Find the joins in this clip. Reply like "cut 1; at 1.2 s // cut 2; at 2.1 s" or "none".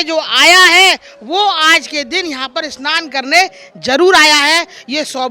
none